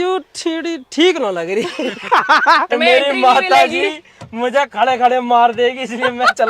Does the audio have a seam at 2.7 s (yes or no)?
yes